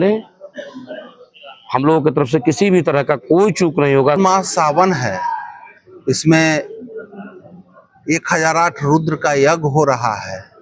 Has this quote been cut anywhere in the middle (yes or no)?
yes